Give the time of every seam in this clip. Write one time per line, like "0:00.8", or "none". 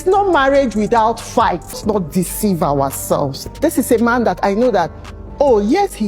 0:01.8